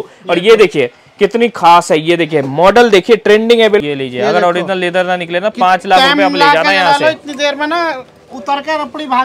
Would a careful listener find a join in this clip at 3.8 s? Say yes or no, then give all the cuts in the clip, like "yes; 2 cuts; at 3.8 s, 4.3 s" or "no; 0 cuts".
yes; 1 cut; at 3.8 s